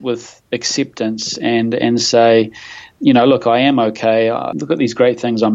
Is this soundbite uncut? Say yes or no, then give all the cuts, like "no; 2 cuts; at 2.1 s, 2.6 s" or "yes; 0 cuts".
no; 2 cuts; at 2.9 s, 4.5 s